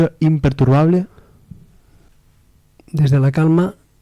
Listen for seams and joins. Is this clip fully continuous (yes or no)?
no